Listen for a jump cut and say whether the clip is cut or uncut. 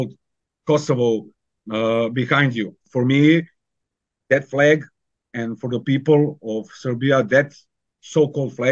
cut